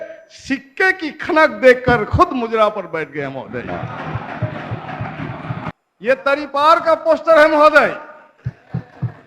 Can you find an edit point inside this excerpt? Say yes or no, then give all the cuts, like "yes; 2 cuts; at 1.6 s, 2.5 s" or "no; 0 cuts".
yes; 1 cut; at 5.7 s